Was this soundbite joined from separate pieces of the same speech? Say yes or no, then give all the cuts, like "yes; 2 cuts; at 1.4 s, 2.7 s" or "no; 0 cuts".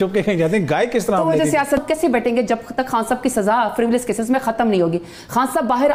yes; 1 cut; at 1.8 s